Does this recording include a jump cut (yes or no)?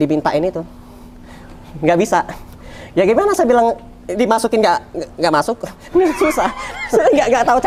no